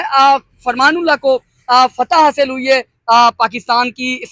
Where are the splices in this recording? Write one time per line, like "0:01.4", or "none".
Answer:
none